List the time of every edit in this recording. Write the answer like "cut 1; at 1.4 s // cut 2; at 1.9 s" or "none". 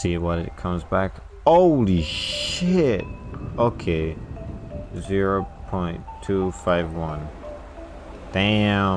none